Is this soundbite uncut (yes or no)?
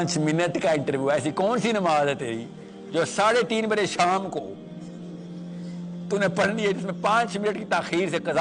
yes